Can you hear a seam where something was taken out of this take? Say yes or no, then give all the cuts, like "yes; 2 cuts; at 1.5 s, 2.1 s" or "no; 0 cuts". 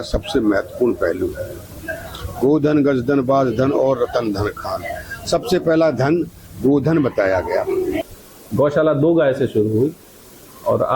yes; 1 cut; at 8.0 s